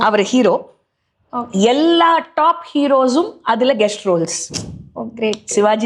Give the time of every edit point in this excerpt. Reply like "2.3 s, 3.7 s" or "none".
none